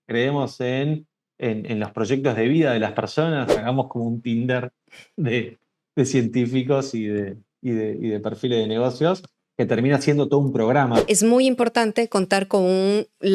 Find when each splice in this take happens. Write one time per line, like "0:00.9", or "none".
0:03.6
0:11.0